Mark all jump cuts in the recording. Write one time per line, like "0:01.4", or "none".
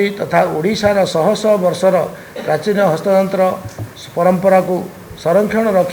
none